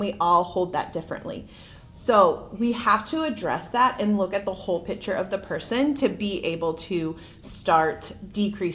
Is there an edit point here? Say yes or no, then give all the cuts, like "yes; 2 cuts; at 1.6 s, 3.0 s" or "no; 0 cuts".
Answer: no; 0 cuts